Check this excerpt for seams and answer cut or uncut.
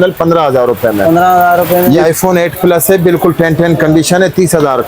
cut